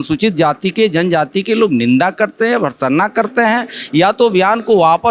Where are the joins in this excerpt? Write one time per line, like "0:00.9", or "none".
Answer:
none